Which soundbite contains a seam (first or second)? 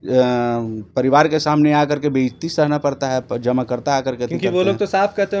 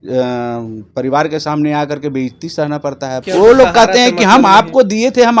second